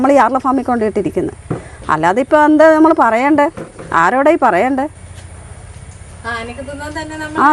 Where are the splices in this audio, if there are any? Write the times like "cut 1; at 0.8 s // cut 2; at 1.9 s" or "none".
none